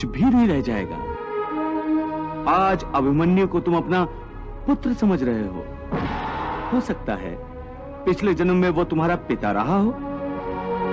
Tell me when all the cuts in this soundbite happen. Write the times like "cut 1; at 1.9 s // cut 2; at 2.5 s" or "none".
cut 1; at 6.6 s